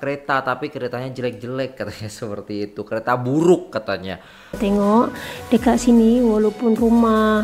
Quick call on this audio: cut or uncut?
cut